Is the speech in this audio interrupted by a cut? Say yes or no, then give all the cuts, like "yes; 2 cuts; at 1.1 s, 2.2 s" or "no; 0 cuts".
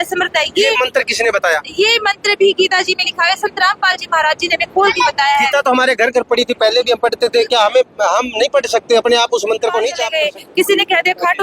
yes; 1 cut; at 10.0 s